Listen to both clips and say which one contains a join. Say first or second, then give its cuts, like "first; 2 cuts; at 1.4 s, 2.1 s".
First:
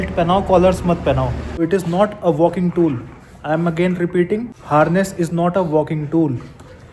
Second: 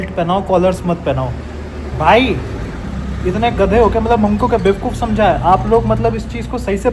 first; 2 cuts; at 1.6 s, 4.5 s